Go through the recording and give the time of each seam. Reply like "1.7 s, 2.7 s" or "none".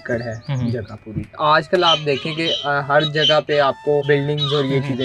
1.4 s, 4.0 s